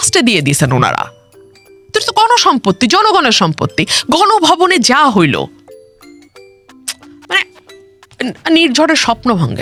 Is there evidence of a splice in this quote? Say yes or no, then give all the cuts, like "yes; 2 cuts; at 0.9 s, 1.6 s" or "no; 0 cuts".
no; 0 cuts